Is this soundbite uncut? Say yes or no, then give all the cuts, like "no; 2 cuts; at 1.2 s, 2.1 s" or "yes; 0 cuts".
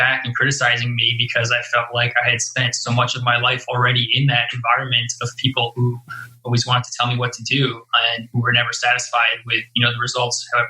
yes; 0 cuts